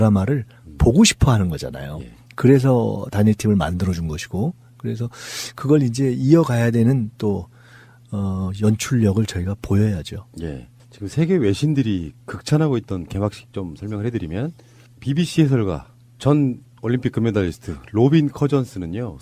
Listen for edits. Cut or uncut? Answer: cut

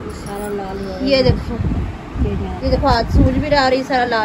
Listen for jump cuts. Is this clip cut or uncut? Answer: uncut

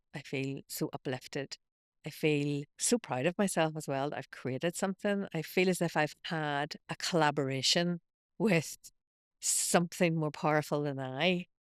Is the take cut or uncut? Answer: cut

